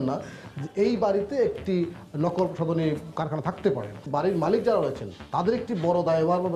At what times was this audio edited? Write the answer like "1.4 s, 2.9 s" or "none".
4.1 s